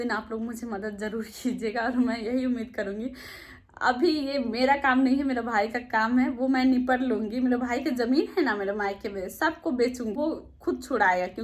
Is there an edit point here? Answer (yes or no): no